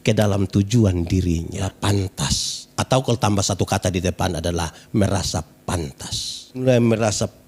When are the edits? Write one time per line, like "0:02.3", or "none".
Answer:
0:01.6
0:06.6